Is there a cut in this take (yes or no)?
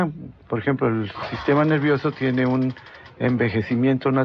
yes